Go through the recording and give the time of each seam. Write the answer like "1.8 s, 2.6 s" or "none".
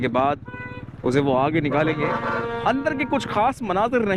none